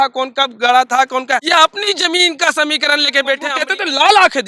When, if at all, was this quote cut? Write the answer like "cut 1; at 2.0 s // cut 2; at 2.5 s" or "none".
cut 1; at 1.5 s // cut 2; at 3.6 s